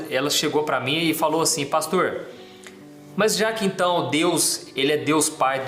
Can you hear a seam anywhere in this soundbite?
no; 0 cuts

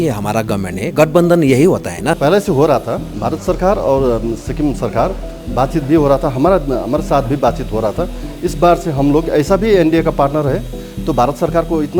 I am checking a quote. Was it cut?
yes; 2 cuts; at 2.2 s, 3.1 s

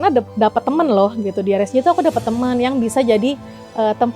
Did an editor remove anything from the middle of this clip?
no; 0 cuts

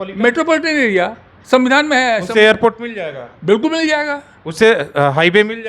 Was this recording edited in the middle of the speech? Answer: no; 0 cuts

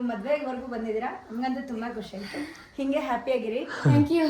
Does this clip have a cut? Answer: no; 0 cuts

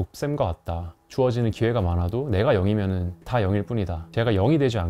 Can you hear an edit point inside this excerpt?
yes; 2 cuts; at 0.9 s, 3.2 s

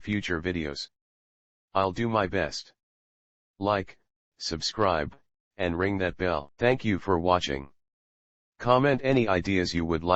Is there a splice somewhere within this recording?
no; 0 cuts

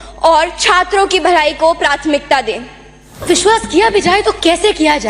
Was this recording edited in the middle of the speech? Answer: yes; 1 cut; at 3.2 s

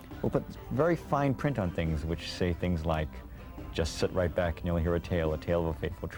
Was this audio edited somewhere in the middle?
no; 0 cuts

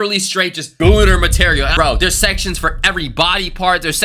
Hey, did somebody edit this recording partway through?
yes; 1 cut; at 1.7 s

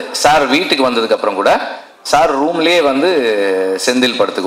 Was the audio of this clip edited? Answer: no; 0 cuts

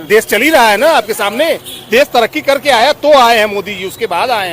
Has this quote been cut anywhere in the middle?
yes; 1 cut; at 1.7 s

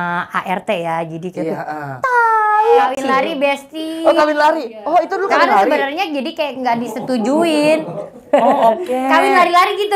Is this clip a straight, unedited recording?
no; 1 cut; at 2.9 s

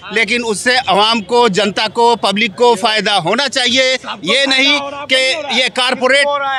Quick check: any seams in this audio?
no; 0 cuts

